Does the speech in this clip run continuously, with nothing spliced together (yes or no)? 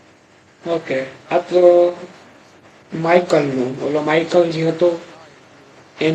yes